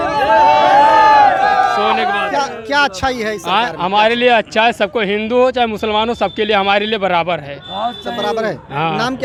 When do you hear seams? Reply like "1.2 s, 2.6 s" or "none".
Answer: none